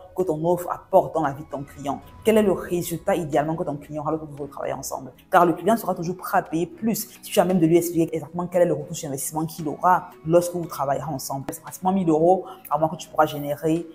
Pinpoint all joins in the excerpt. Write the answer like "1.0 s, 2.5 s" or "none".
11.5 s